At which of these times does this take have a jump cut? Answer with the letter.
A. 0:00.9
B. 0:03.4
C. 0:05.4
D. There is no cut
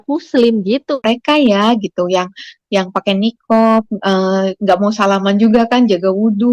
A